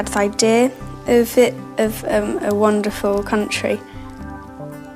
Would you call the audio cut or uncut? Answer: uncut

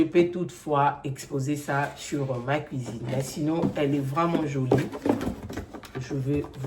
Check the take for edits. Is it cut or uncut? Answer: uncut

